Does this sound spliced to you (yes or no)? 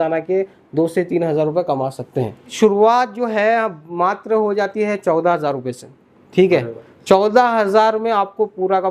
yes